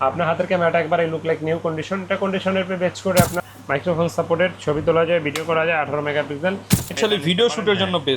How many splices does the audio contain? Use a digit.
2